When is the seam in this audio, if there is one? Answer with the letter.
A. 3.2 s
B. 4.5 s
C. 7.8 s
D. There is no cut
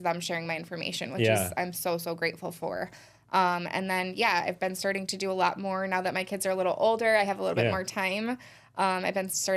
D